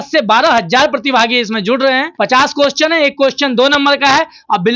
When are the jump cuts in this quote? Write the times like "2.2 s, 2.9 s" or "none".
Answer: 2.1 s